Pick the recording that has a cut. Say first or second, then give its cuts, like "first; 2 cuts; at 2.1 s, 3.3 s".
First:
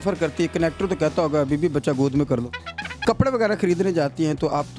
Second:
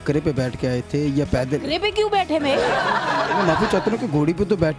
first; 1 cut; at 3.0 s